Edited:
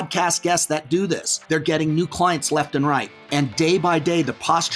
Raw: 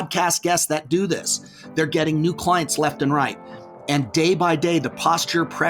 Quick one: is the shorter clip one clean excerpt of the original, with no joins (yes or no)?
no